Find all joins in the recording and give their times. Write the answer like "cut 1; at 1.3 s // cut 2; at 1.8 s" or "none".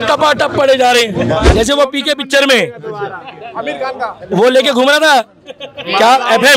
cut 1; at 1.5 s

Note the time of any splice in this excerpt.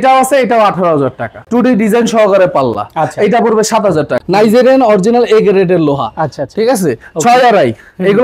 cut 1; at 1.3 s // cut 2; at 4.2 s

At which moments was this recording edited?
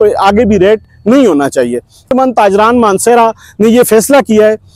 cut 1; at 2.1 s

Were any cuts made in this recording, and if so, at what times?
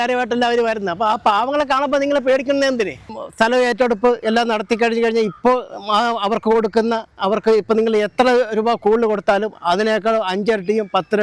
cut 1; at 3.2 s

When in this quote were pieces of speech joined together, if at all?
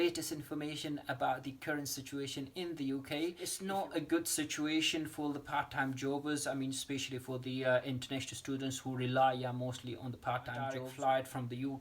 cut 1; at 3.5 s // cut 2; at 10.8 s

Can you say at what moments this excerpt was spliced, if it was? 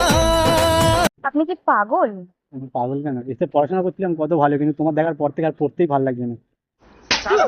none

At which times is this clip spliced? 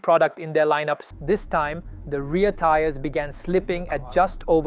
cut 1; at 1.0 s

